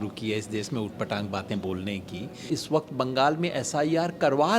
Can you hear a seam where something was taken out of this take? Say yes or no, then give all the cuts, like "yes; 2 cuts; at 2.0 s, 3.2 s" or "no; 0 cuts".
yes; 1 cut; at 2.4 s